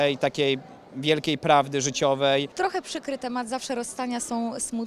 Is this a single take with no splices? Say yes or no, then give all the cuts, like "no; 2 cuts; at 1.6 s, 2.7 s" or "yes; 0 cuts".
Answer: no; 1 cut; at 2.5 s